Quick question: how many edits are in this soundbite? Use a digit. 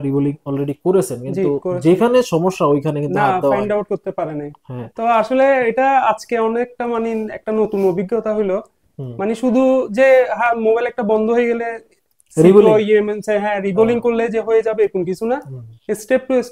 0